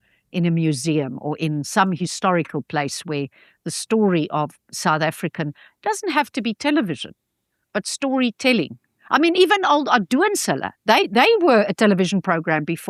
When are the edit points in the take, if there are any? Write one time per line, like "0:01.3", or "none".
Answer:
none

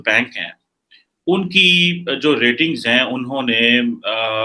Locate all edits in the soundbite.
none

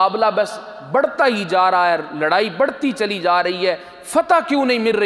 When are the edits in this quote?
none

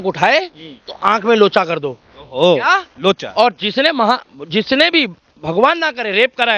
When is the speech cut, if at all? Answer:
none

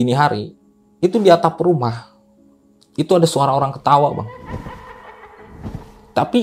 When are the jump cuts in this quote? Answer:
none

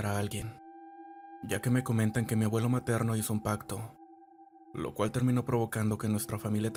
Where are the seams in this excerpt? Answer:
none

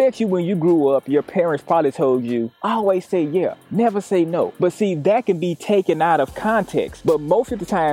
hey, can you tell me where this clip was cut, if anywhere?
0:04.5
0:07.0

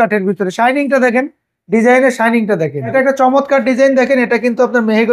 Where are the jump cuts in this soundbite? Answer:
0:02.9

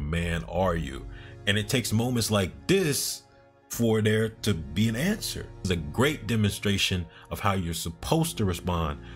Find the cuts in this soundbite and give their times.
0:05.6

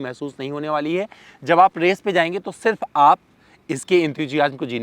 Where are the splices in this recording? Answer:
none

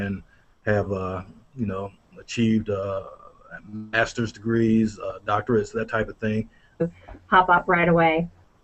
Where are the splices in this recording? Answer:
none

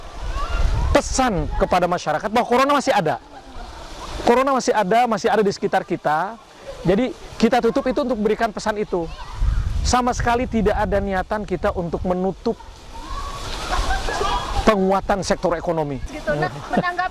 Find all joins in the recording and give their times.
0:16.1

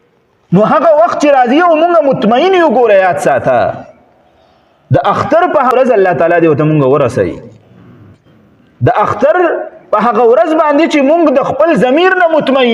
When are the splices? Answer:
0:05.7

